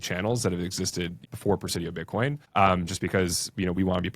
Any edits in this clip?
yes; 2 cuts; at 1.2 s, 2.4 s

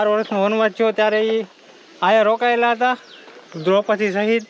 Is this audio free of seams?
yes; 0 cuts

